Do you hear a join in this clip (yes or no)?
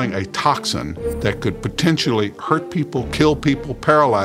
no